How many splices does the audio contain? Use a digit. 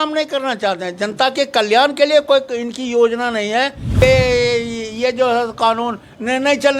1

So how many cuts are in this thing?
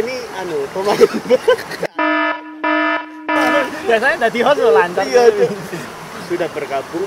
1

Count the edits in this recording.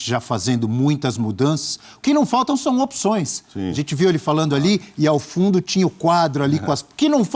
0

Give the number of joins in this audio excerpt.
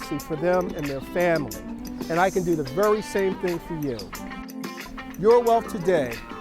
1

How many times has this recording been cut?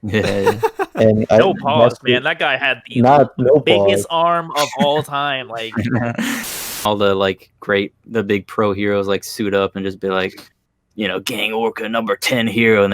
1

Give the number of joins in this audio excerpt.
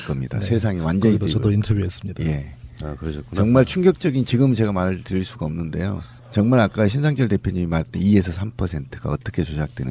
1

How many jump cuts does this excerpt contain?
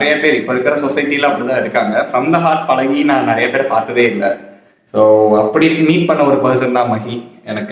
0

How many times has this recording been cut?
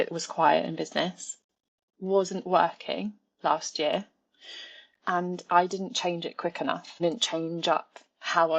1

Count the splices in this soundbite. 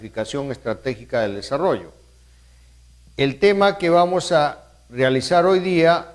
0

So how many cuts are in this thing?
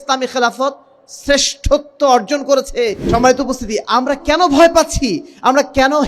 1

